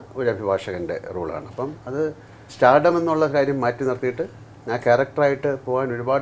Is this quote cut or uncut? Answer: uncut